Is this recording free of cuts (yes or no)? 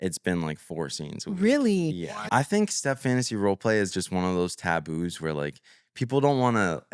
no